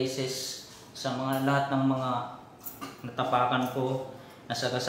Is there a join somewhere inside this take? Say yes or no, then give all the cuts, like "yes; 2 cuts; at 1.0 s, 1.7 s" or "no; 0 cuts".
yes; 1 cut; at 1.9 s